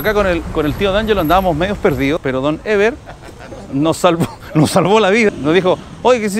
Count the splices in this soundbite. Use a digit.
2